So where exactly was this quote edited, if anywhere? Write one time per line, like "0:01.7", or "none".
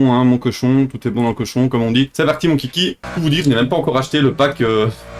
0:02.1
0:03.0